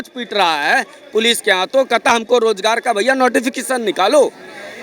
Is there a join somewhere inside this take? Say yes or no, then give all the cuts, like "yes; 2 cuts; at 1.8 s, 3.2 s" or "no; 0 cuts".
no; 0 cuts